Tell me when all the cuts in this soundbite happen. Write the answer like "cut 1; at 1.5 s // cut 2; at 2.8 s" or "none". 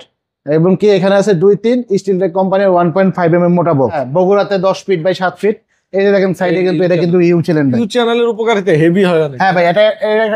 cut 1; at 4.0 s